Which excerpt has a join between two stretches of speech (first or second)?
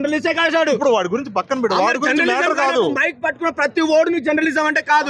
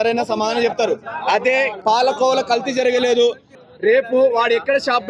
second